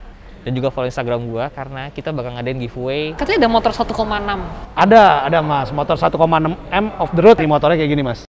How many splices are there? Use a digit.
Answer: 2